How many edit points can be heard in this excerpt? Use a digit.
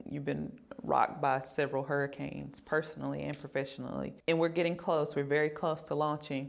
1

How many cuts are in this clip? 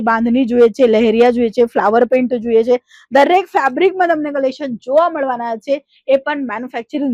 0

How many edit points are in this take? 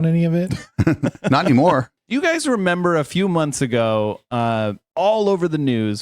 1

